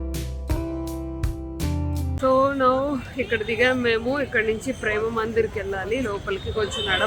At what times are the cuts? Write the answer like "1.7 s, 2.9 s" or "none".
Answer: 2.2 s